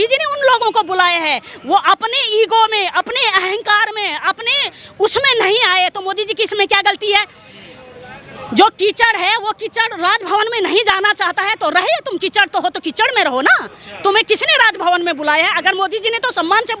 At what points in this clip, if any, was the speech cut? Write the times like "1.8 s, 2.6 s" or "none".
none